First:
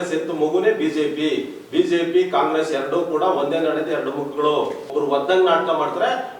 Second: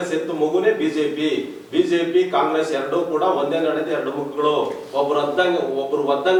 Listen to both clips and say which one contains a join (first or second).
first